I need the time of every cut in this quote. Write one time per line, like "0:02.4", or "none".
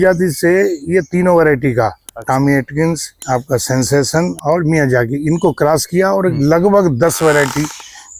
0:03.1
0:04.4